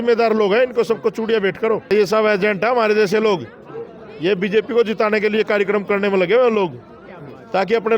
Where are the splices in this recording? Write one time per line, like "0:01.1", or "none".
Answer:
0:01.9

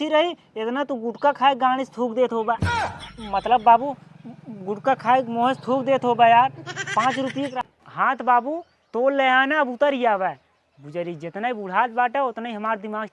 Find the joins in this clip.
0:07.5

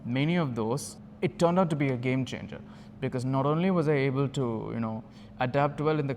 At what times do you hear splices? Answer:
0:01.0

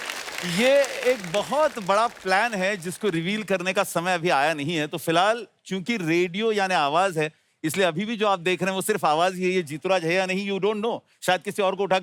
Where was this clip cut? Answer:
none

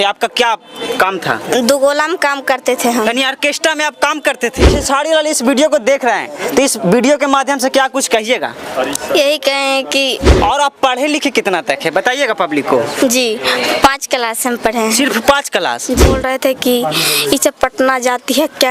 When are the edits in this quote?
0:04.7
0:10.3
0:16.1

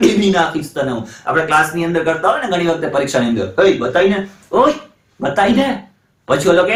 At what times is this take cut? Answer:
none

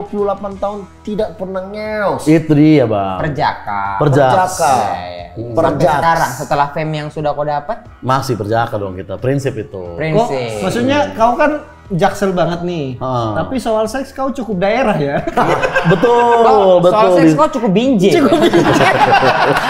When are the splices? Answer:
none

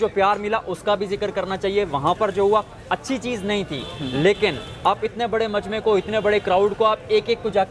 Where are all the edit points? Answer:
none

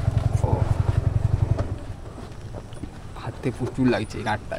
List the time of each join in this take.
none

